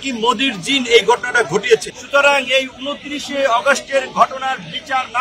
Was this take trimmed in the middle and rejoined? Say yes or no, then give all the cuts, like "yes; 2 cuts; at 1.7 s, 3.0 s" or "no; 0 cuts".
yes; 1 cut; at 1.9 s